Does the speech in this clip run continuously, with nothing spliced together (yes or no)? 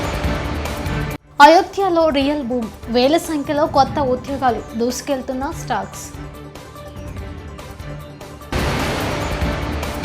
no